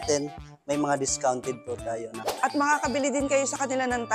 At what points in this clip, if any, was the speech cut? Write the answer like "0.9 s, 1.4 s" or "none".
2.1 s